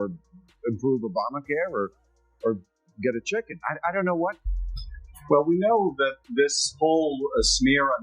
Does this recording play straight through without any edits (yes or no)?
no